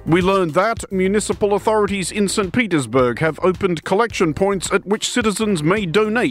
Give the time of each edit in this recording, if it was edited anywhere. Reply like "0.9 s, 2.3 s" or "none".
0.9 s